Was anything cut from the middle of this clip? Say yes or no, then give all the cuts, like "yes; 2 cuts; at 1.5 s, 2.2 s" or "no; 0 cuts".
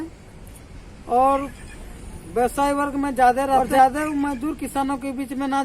yes; 1 cut; at 3.6 s